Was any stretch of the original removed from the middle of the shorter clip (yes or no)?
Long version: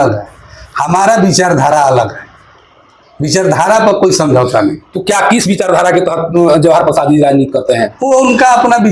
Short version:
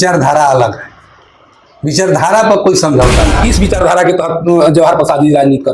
yes